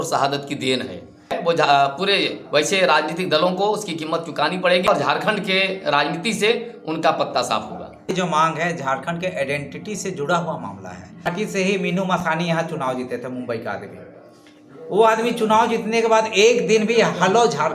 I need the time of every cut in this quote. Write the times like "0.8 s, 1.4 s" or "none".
1.4 s, 4.9 s, 8.1 s, 11.3 s